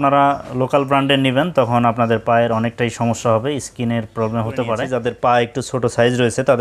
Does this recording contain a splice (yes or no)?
yes